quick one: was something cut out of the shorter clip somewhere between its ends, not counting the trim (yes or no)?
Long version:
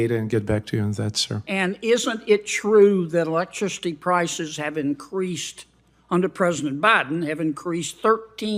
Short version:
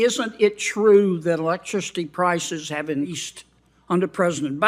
yes